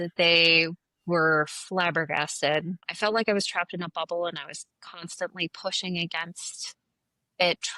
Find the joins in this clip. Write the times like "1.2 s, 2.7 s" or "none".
2.9 s